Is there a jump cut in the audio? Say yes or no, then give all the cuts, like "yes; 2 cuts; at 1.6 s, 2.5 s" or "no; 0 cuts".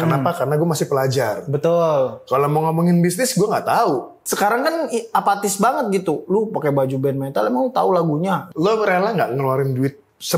yes; 2 cuts; at 4.2 s, 8.5 s